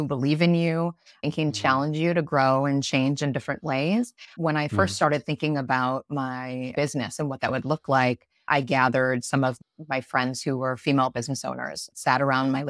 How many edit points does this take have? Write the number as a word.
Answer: two